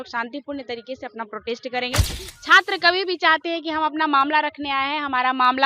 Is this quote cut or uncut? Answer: cut